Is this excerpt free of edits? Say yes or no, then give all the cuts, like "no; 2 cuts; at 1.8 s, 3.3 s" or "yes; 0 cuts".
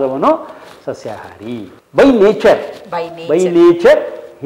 yes; 0 cuts